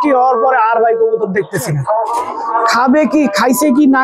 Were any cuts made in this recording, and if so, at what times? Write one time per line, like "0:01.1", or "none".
0:02.2